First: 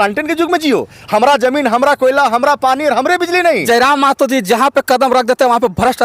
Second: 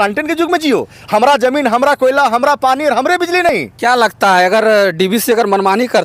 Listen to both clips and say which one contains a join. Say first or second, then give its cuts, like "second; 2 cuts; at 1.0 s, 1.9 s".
first; 1 cut; at 3.6 s